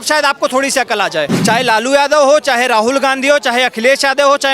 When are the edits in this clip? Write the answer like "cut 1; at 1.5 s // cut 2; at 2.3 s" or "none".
cut 1; at 1.3 s